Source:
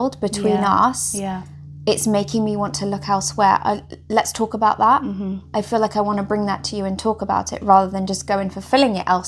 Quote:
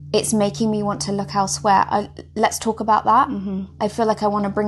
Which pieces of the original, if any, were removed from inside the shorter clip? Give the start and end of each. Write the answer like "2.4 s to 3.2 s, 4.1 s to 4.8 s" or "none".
none